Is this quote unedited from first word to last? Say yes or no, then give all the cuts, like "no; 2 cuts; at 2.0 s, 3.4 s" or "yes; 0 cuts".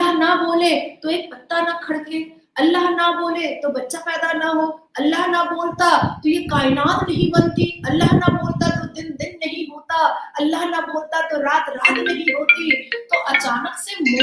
yes; 0 cuts